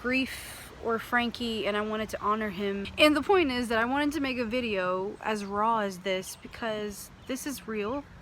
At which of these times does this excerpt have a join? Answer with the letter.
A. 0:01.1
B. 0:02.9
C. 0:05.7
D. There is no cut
B